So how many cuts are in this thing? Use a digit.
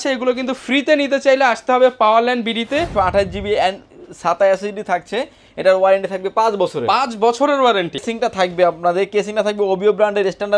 2